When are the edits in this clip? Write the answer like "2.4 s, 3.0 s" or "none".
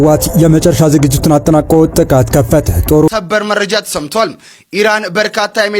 3.1 s